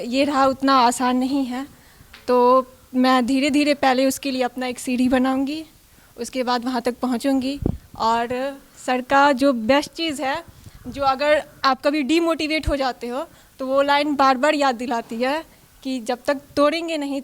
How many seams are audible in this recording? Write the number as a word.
zero